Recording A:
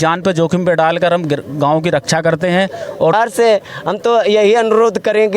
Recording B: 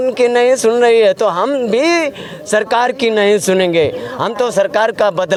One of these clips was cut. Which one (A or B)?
A